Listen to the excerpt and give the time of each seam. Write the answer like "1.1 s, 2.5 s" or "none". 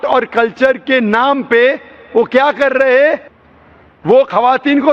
none